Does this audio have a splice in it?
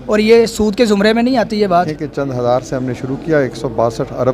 yes; 1 cut; at 1.8 s

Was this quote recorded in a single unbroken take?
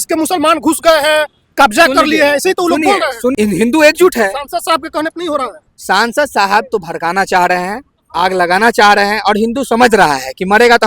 no; 1 cut; at 3.3 s

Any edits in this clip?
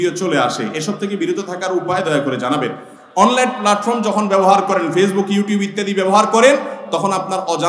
no; 0 cuts

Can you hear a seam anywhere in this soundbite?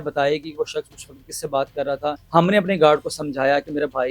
yes; 1 cut; at 2.2 s

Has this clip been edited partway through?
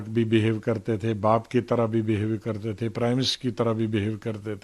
no; 0 cuts

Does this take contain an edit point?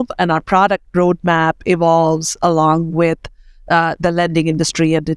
no; 0 cuts

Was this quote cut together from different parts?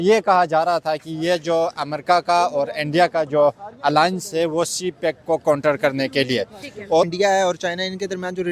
yes; 1 cut; at 7.1 s

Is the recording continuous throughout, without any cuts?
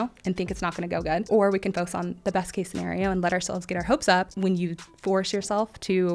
no; 2 cuts; at 1.2 s, 4.3 s

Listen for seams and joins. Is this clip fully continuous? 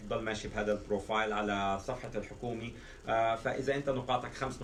yes; 0 cuts

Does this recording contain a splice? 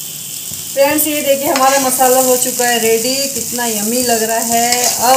no; 0 cuts

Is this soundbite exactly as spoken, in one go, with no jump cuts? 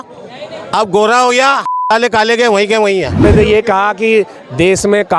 no; 1 cut; at 3.2 s

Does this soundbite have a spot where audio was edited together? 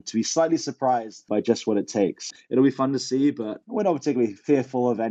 yes; 3 cuts; at 1.2 s, 2.3 s, 3.5 s

